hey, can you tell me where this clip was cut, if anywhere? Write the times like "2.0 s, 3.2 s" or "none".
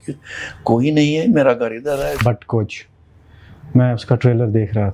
2.2 s

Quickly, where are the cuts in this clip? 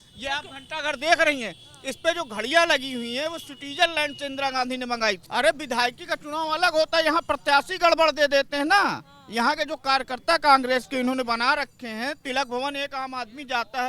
5.2 s

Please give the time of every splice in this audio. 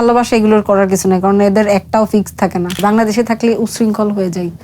2.8 s

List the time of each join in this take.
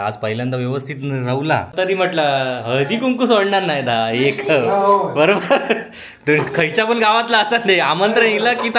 1.7 s

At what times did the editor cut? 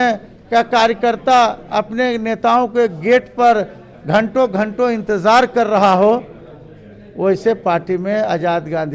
none

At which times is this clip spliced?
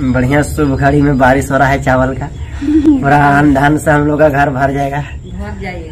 none

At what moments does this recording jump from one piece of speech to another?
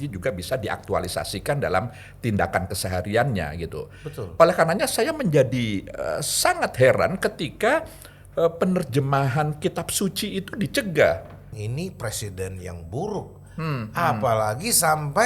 11.5 s

